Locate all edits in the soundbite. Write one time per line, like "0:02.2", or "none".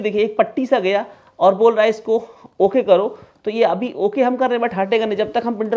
none